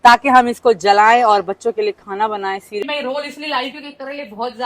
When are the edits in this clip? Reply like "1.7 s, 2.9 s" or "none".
2.8 s